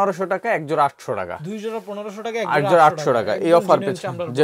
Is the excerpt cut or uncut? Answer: uncut